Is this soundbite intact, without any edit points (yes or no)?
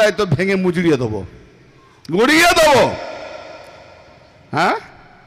yes